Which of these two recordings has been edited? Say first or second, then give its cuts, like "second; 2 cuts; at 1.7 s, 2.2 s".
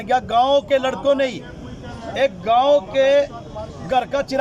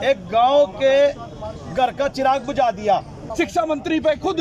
second; 1 cut; at 3.2 s